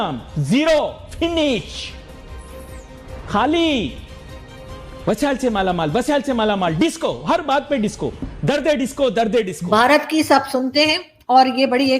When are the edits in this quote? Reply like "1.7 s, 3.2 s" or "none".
9.6 s